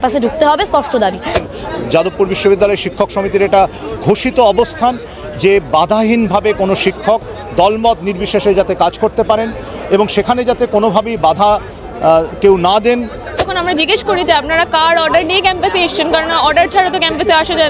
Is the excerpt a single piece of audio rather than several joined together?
no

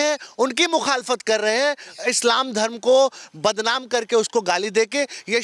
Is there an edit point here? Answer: no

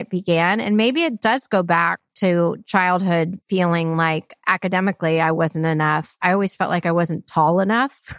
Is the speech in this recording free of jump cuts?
no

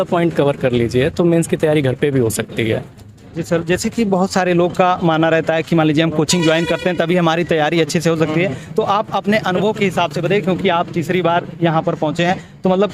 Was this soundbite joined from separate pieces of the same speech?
no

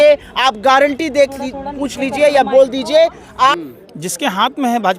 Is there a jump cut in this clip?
yes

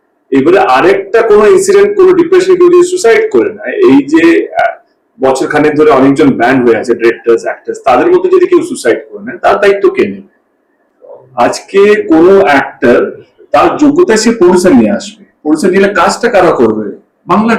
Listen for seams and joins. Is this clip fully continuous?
yes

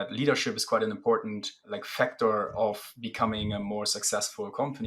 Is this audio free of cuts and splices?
no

